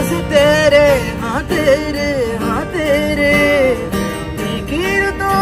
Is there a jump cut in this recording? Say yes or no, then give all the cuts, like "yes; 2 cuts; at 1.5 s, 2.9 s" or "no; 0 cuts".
no; 0 cuts